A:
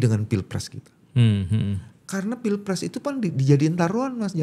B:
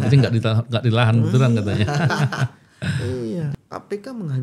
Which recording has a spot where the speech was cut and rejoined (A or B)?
B